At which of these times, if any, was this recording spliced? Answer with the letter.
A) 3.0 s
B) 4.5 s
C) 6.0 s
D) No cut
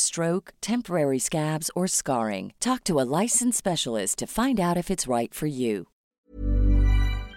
C